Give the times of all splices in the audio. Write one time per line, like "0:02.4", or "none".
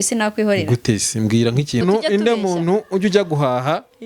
0:01.8